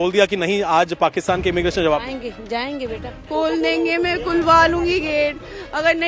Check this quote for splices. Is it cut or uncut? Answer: cut